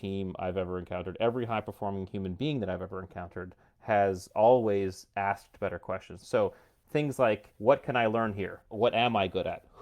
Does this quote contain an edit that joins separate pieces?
yes; 3 cuts; at 6.2 s, 7.5 s, 8.7 s

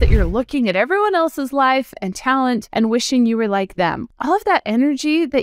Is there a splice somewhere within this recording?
yes; 2 cuts; at 2.7 s, 4.0 s

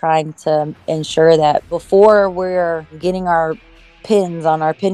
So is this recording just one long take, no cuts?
no; 1 cut; at 1.8 s

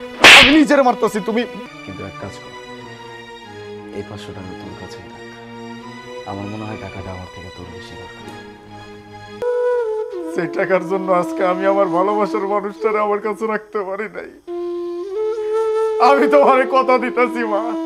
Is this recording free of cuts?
no; 2 cuts; at 1.6 s, 9.4 s

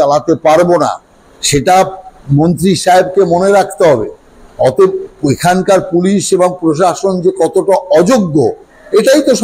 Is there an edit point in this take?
no; 0 cuts

